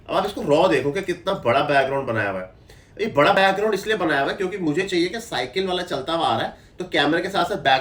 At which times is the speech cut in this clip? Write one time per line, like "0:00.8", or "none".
none